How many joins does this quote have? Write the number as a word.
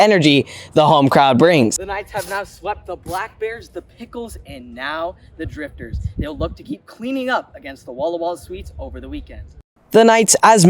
two